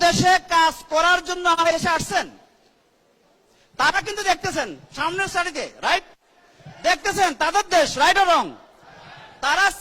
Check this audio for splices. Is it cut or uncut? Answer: cut